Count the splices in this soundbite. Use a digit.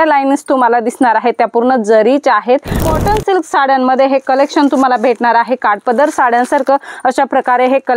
1